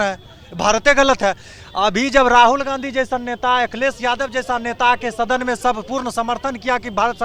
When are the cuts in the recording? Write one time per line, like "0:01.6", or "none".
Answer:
none